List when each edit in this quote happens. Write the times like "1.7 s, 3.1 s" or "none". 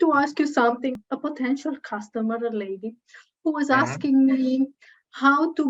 0.9 s